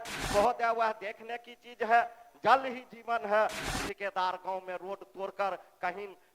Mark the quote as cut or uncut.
cut